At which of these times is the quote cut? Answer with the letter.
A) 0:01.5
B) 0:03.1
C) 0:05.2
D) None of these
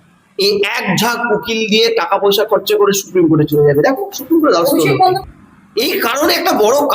C